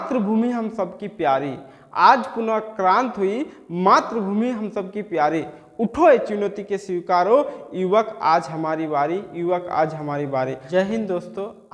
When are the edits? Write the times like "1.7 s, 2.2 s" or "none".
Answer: 10.6 s

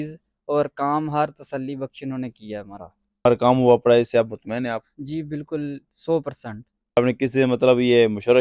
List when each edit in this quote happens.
3.2 s, 7.0 s

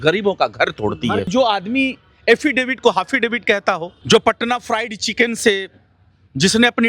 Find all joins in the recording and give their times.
1.3 s, 3.9 s

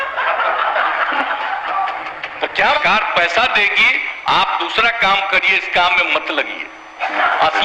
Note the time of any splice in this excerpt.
2.8 s

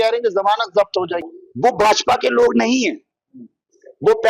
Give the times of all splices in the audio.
1.2 s

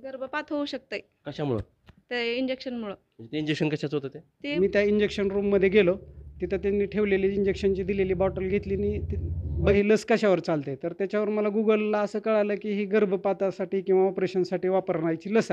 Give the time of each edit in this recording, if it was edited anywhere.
4.5 s, 9.7 s

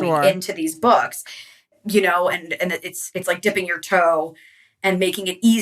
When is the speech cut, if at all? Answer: 1.7 s

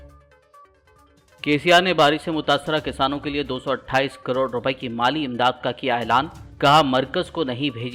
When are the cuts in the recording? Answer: 0.9 s

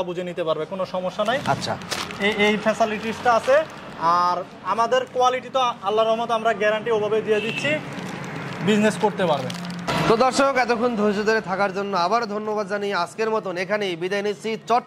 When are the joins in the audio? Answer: none

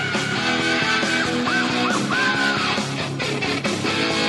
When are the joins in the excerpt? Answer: 2.6 s

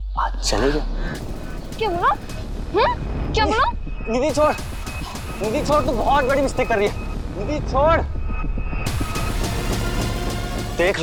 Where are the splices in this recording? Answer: none

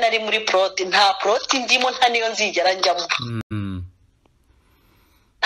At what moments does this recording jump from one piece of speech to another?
none

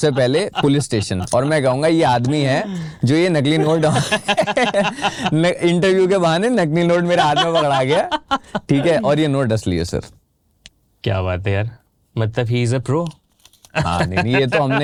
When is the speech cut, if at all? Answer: none

